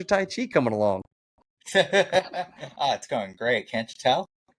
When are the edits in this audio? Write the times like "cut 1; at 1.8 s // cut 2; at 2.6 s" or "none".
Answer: none